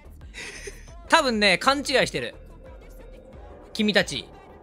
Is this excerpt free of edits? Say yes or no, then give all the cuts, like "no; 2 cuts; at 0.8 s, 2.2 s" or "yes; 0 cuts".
yes; 0 cuts